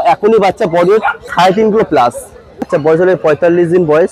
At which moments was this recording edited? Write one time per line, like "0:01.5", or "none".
0:01.2
0:02.7